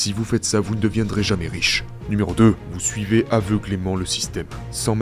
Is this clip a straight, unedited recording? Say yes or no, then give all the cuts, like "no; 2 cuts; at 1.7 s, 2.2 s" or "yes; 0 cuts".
yes; 0 cuts